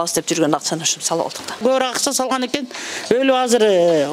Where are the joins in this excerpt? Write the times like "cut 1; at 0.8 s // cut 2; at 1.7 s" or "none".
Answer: cut 1; at 1.6 s